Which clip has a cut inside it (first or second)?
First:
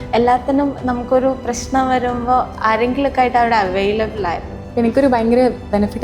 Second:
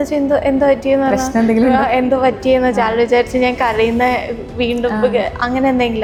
first